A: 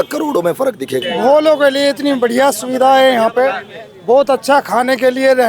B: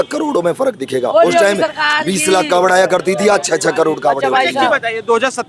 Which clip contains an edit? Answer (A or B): A